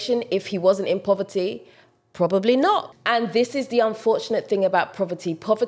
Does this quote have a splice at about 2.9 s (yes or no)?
yes